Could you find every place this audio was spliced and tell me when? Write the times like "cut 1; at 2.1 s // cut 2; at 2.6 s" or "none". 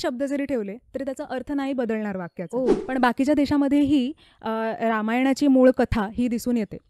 cut 1; at 2.8 s